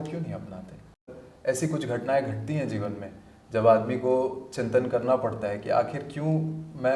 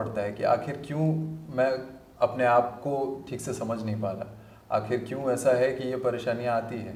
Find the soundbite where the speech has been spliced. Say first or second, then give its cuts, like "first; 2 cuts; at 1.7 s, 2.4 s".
first; 1 cut; at 1.1 s